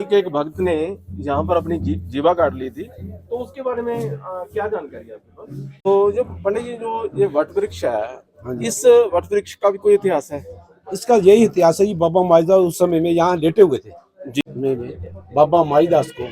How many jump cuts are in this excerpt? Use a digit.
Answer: 2